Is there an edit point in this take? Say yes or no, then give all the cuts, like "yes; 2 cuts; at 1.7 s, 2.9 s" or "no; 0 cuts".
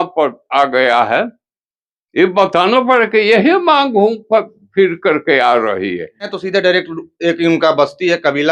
yes; 1 cut; at 6.3 s